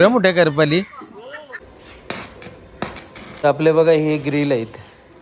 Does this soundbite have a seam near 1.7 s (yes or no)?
yes